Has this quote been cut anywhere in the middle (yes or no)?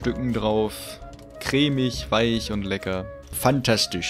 yes